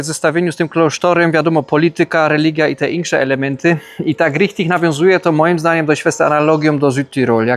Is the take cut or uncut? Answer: uncut